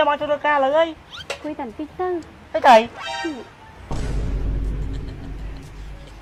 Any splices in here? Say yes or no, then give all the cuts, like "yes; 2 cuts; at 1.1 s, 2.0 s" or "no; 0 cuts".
no; 0 cuts